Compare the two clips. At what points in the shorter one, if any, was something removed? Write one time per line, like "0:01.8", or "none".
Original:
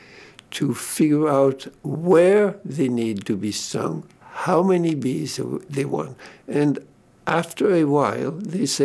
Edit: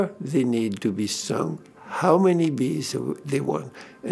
none